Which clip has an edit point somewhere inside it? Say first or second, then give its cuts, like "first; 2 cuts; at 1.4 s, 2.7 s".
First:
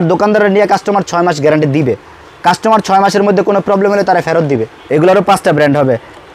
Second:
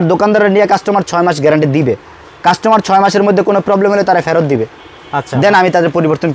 first; 1 cut; at 4.8 s